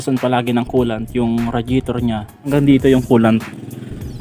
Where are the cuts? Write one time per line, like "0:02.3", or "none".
0:02.4